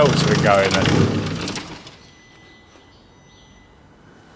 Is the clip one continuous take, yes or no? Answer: no